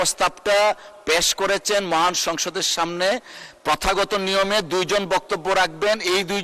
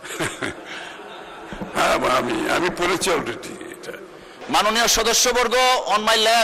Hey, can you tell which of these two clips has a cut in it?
second; 1 cut; at 4.4 s

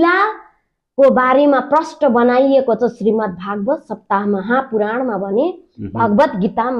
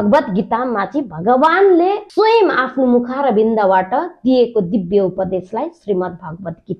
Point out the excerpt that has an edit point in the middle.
second; 1 cut; at 2.0 s

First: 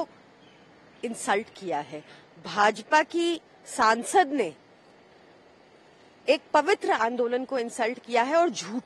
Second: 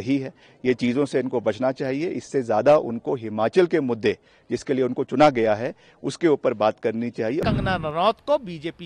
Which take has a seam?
second; 1 cut; at 7.4 s

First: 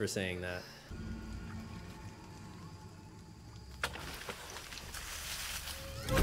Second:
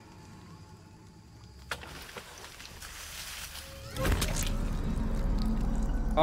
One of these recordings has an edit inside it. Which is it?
first; 1 cut; at 0.9 s

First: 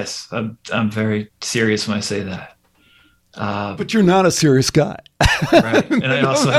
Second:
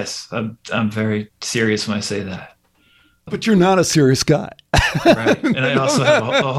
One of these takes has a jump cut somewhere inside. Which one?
second; 1 cut; at 3.3 s

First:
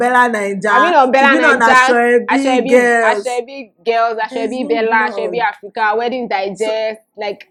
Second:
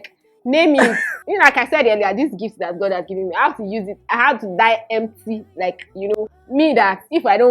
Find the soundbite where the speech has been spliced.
second; 2 cuts; at 1.1 s, 6.2 s

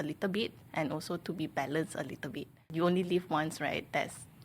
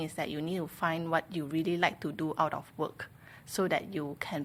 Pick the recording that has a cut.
first; 1 cut; at 2.7 s

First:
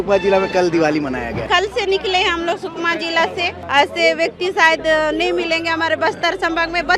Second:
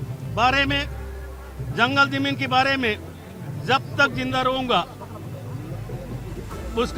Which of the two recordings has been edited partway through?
first; 2 cuts; at 1.4 s, 3.6 s

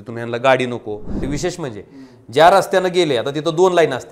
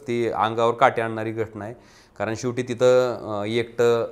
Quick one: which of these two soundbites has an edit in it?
first; 1 cut; at 1.2 s

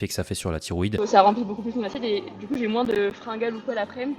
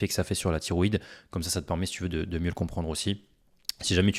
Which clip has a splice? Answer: first; 1 cut; at 1.0 s

